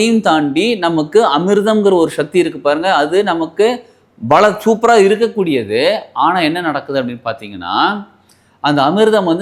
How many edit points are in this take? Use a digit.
0